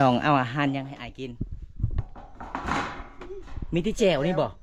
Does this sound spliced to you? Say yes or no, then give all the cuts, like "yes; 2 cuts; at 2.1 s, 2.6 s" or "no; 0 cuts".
no; 0 cuts